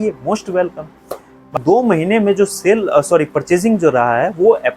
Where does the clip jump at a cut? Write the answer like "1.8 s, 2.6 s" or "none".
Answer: 1.5 s